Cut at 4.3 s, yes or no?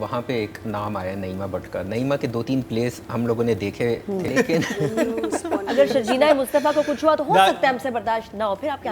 yes